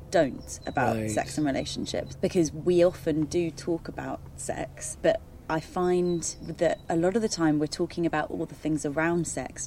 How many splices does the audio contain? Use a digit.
3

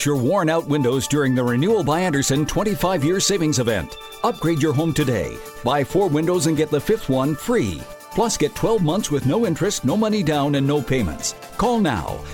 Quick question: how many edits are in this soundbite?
0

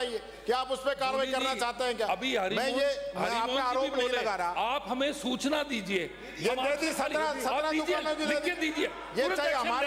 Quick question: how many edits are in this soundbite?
0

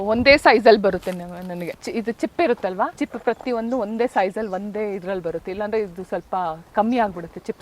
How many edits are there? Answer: 2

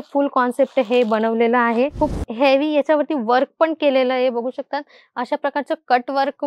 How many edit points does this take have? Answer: 1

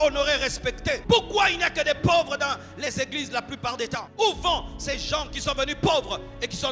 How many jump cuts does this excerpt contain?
2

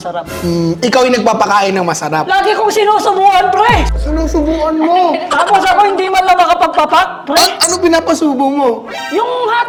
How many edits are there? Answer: 0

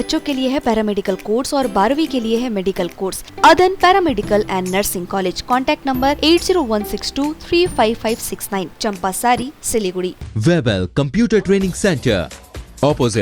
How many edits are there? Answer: 2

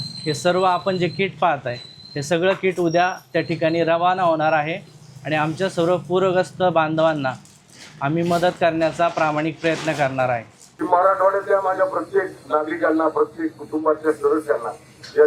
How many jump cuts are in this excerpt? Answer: 1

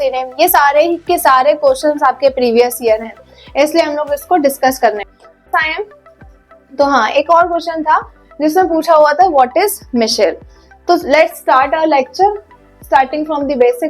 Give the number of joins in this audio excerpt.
1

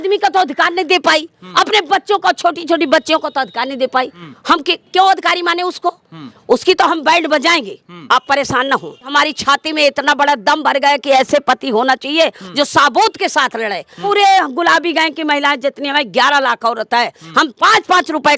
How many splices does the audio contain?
3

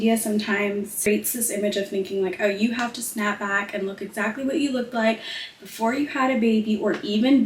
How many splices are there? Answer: 1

